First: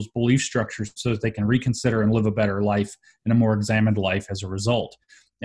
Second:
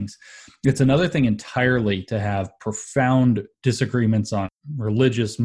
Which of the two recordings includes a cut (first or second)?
second